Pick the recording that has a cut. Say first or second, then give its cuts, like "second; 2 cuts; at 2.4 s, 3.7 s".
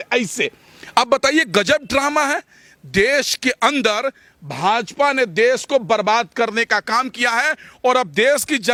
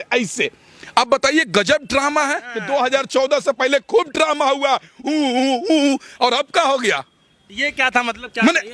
second; 1 cut; at 2.5 s